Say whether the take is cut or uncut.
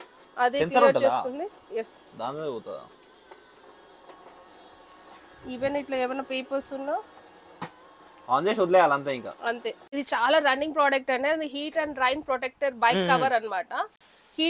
cut